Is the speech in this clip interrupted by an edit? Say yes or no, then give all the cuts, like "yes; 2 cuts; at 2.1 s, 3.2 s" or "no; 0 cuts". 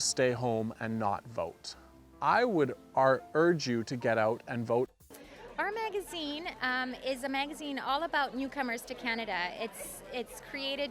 yes; 1 cut; at 4.9 s